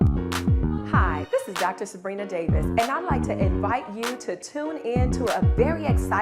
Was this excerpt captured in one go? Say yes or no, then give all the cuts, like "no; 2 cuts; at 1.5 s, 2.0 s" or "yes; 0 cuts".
no; 1 cut; at 0.9 s